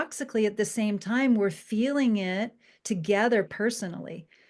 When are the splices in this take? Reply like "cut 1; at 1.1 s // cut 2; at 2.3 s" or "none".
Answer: cut 1; at 3.5 s

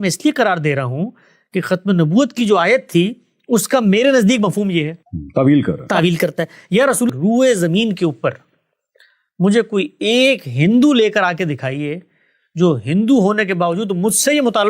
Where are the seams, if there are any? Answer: cut 1; at 7.1 s

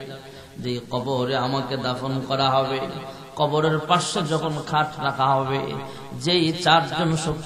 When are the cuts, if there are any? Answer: none

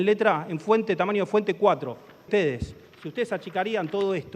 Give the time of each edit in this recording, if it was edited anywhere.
cut 1; at 2.3 s

